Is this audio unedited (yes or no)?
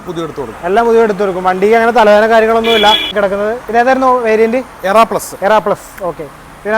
no